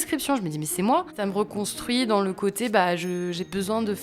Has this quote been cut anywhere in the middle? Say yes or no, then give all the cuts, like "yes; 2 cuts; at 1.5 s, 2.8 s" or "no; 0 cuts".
yes; 1 cut; at 1.2 s